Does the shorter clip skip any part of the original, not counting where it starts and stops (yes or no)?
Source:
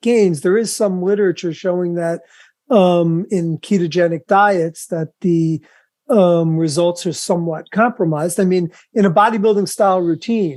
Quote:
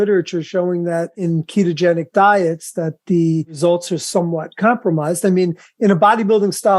yes